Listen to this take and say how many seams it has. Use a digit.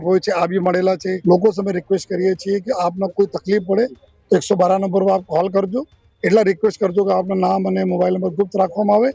1